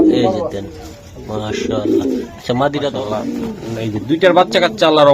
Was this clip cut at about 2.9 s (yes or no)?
yes